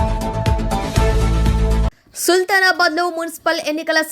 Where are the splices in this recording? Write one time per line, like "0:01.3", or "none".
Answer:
0:02.0

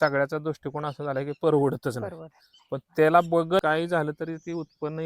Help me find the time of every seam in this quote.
0:03.6

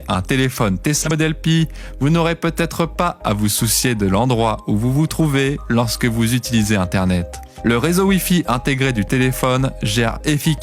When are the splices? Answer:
0:01.1

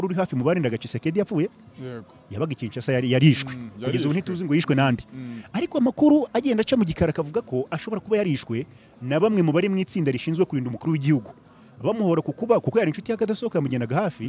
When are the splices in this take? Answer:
none

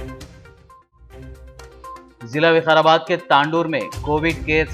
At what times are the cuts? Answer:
0:01.6

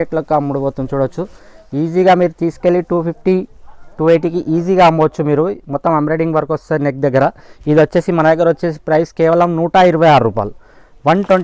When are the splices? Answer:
none

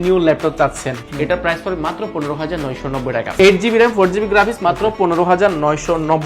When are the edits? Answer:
0:01.1
0:03.4

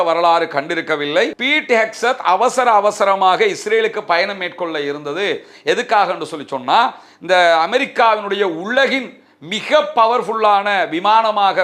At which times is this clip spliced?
0:01.4

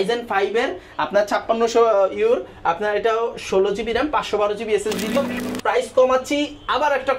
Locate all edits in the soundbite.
0:05.2

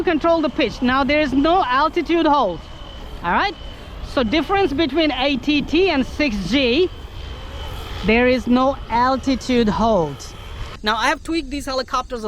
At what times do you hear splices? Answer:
0:10.7

